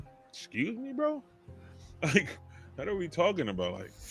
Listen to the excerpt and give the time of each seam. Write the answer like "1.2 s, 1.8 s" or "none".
none

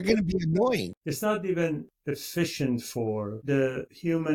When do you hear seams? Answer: 0.9 s, 3.3 s

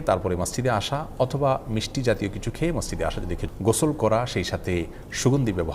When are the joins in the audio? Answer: 3.4 s

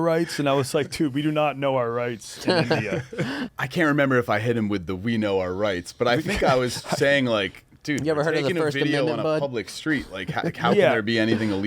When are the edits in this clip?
3.5 s

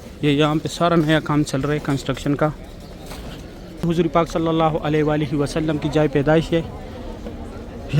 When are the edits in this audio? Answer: 3.8 s

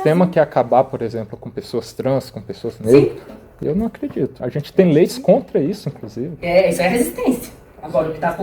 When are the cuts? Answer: none

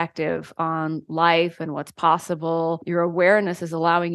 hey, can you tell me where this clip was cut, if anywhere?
2.8 s

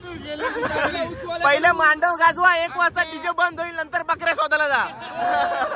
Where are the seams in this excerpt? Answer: none

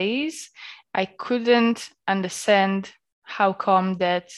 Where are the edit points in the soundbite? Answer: none

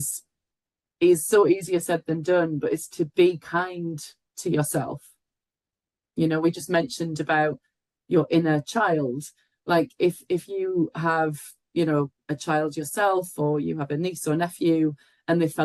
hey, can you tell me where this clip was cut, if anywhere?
none

